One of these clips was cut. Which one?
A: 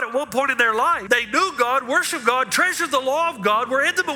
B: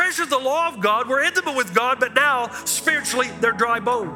A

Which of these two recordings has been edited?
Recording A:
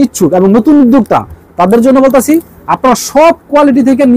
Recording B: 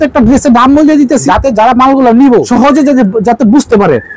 B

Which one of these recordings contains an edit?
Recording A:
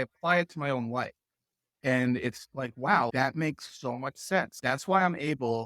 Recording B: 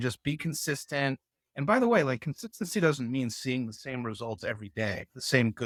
A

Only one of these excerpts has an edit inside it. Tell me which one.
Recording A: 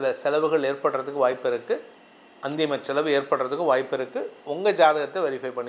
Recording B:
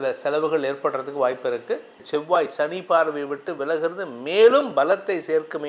B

